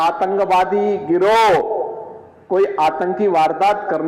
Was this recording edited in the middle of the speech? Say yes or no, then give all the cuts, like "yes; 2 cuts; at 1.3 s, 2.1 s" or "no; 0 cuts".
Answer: no; 0 cuts